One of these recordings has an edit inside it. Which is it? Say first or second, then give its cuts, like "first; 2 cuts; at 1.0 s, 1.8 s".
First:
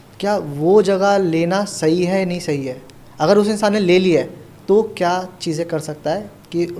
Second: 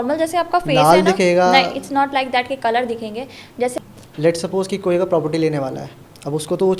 second; 1 cut; at 3.8 s